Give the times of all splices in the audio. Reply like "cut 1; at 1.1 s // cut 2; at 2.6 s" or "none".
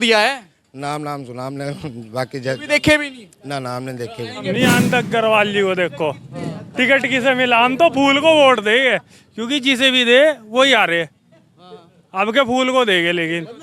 cut 1; at 4.5 s

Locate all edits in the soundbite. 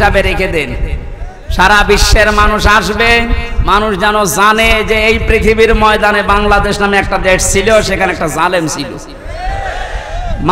none

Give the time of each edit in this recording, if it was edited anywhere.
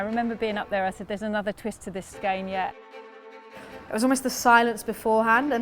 cut 1; at 2.1 s // cut 2; at 3.4 s

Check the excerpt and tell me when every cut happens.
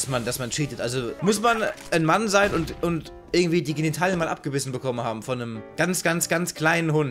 none

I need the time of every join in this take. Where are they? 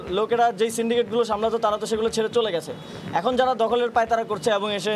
none

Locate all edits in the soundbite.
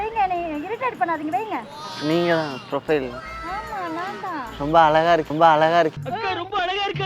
cut 1; at 1.8 s // cut 2; at 5.3 s

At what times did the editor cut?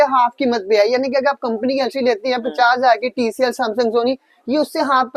none

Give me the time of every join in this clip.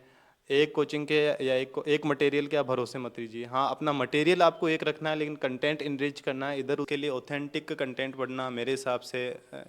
cut 1; at 6.9 s

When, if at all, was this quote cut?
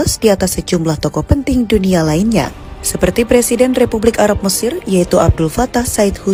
none

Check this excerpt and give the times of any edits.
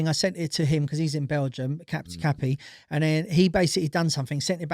none

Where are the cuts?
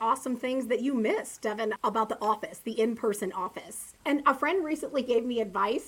cut 1; at 1.8 s // cut 2; at 3.9 s

